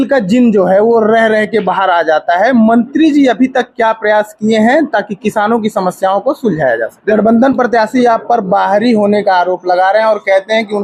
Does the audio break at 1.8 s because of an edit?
no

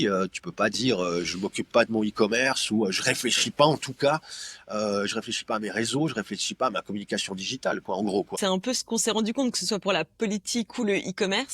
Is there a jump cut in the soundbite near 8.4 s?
yes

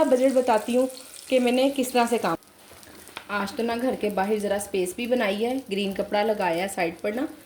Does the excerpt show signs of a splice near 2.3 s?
yes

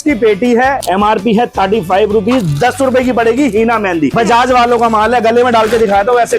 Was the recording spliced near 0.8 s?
yes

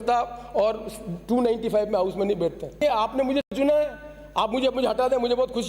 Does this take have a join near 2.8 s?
yes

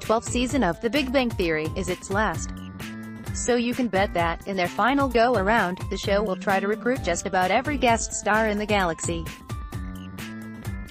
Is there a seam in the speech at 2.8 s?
no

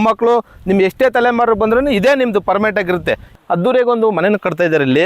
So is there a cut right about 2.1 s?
no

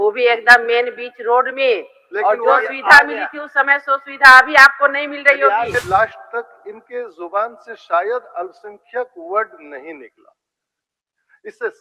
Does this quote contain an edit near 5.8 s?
yes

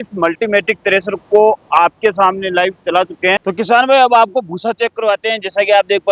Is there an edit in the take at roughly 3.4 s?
yes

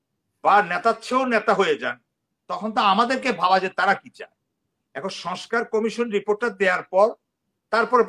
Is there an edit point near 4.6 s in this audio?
no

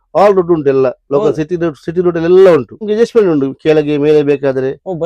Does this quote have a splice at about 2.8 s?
yes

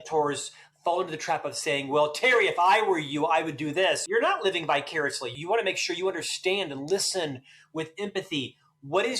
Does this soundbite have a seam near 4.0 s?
yes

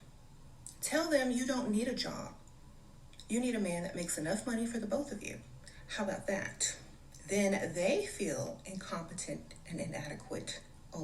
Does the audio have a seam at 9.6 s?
no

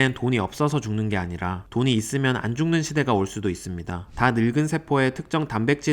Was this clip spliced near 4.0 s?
yes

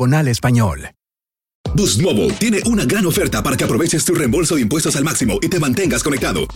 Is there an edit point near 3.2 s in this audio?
no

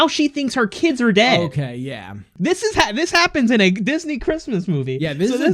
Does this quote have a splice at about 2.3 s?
yes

